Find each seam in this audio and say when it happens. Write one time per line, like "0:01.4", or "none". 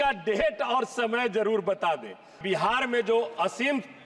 0:02.3